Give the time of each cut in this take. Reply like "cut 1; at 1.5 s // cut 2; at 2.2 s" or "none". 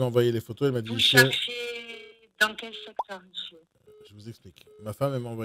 cut 1; at 3.7 s